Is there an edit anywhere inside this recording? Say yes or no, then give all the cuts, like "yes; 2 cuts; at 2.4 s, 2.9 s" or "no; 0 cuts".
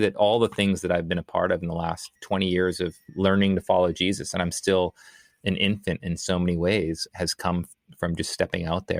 no; 0 cuts